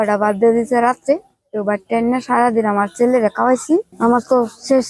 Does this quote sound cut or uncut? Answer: cut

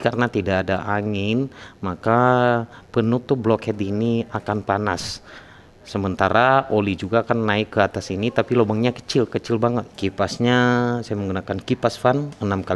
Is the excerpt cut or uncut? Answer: cut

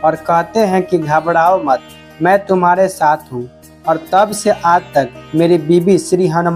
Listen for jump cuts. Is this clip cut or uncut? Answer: cut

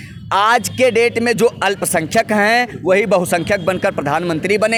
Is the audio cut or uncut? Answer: uncut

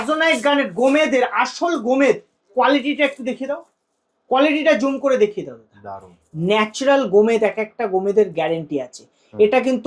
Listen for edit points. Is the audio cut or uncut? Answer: uncut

